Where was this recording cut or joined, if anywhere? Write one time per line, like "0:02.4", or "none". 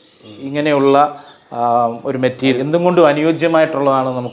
0:02.6